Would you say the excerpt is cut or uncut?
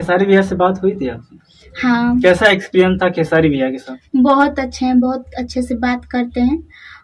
cut